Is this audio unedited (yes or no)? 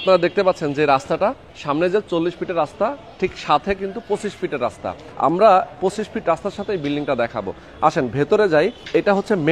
yes